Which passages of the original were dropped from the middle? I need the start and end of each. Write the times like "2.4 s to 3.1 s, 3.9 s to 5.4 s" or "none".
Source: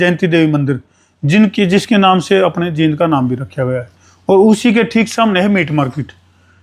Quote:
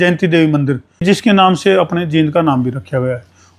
1.0 s to 1.7 s